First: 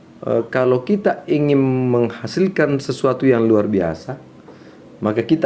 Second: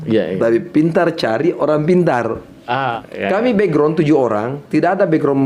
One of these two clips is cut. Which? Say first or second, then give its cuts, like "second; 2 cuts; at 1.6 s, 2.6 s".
second; 1 cut; at 3.0 s